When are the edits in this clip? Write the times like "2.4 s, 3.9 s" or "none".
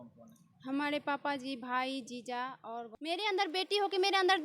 2.9 s